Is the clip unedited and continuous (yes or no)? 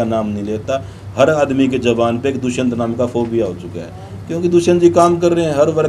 yes